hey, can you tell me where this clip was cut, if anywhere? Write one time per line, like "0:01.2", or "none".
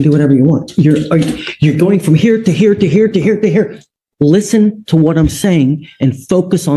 none